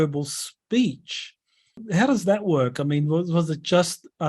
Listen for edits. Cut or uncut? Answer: cut